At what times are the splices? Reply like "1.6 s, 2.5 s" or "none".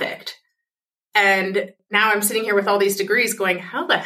1.8 s